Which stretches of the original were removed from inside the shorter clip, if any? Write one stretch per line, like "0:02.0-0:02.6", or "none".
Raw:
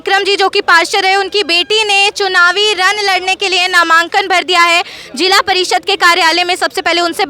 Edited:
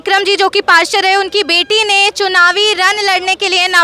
none